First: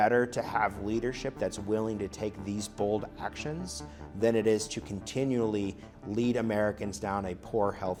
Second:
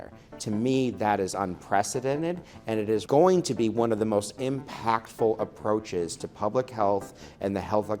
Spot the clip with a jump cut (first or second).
second